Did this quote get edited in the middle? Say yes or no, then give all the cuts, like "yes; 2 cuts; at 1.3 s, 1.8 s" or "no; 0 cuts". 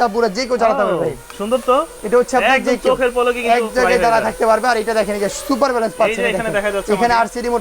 no; 0 cuts